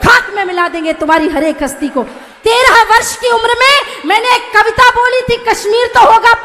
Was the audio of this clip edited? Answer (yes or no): yes